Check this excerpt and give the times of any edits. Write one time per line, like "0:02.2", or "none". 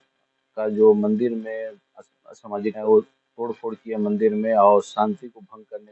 0:02.8